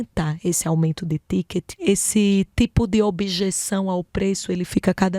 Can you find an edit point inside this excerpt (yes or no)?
yes